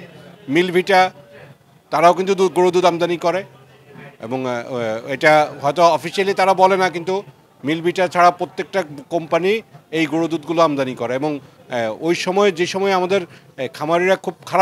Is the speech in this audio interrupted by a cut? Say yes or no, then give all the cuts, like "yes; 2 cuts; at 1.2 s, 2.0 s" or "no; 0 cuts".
no; 0 cuts